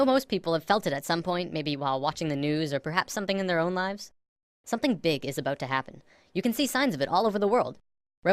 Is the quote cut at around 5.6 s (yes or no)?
yes